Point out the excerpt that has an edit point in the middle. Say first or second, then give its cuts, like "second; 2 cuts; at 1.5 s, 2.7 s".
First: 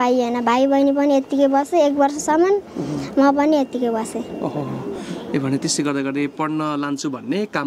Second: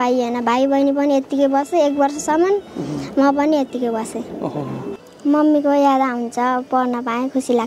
second; 1 cut; at 5.0 s